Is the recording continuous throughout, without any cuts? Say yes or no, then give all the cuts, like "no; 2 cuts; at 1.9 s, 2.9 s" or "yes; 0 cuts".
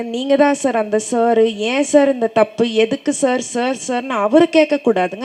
yes; 0 cuts